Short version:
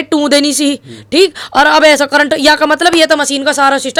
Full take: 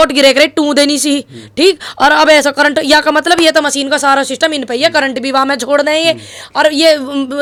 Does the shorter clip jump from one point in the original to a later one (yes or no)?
no